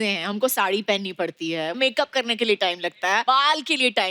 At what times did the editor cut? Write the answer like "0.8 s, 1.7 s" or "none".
1.8 s, 3.2 s